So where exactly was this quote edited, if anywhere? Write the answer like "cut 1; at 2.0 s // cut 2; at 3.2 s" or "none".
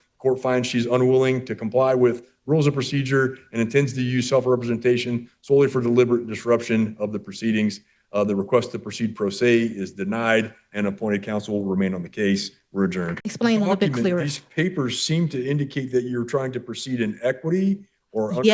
cut 1; at 13.2 s